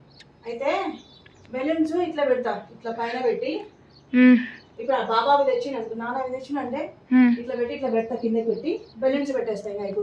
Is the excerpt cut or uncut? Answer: uncut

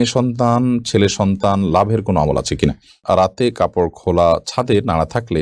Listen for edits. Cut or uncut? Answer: cut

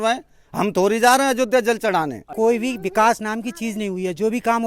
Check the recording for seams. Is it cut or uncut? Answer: cut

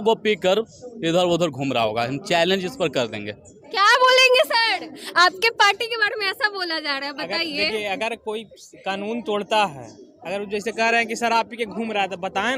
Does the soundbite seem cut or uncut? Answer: uncut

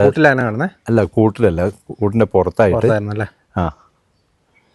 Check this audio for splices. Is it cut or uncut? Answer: uncut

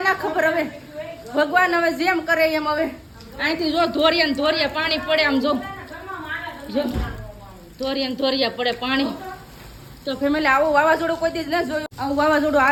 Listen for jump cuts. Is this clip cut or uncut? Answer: uncut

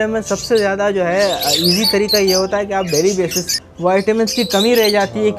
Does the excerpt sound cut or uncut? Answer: cut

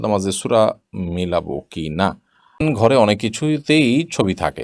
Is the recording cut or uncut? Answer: cut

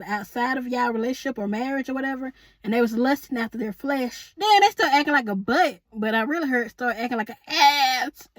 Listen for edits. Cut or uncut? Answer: cut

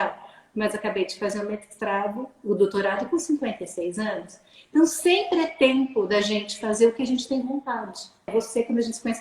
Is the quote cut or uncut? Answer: cut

